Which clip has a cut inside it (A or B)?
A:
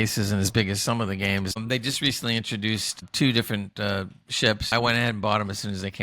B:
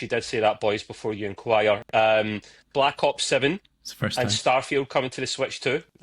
A